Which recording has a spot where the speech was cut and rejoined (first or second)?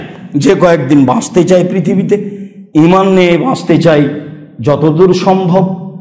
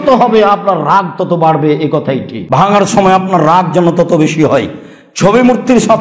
second